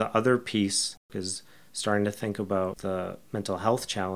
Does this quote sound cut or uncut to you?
cut